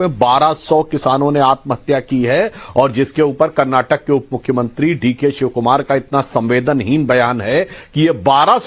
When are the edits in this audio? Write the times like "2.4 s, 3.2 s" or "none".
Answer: none